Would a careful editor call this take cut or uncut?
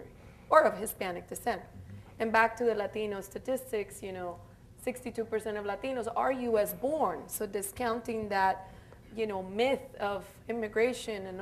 cut